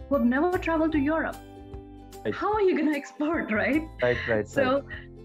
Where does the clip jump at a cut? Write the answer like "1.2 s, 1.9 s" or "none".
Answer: none